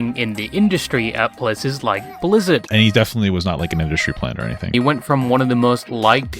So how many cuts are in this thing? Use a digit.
2